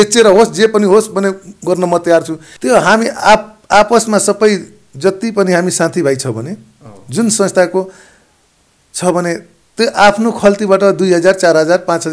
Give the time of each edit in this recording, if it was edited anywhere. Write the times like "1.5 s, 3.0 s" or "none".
2.4 s